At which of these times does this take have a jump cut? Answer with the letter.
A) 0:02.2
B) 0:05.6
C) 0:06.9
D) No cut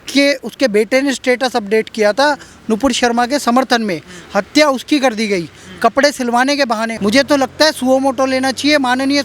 C